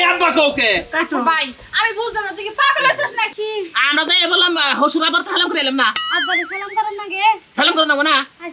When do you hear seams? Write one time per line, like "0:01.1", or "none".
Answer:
0:03.3

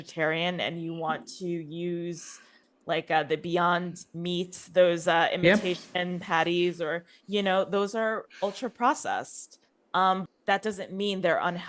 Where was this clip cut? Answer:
0:10.2

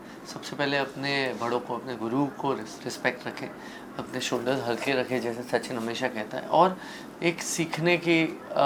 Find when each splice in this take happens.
none

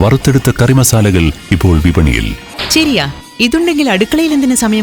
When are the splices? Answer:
0:02.5

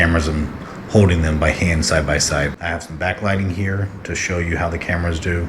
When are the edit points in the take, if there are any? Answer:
0:02.5

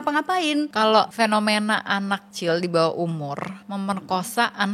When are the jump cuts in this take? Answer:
0:00.9
0:02.3
0:03.6

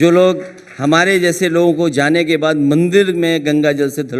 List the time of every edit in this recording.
0:01.8

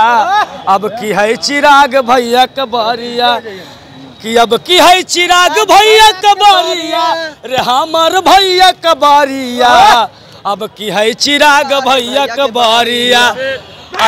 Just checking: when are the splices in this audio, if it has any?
none

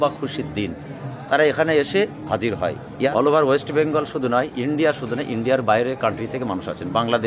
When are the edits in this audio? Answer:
0:02.9

